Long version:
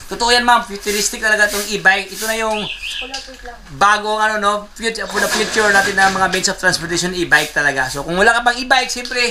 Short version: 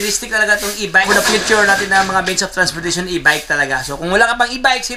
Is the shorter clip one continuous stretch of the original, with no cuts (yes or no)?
no